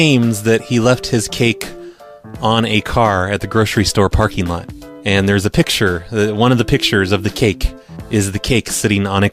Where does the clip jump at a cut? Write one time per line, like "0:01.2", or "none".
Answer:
none